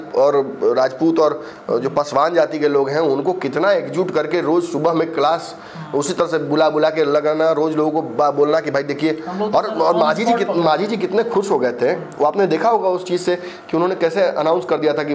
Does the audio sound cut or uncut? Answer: uncut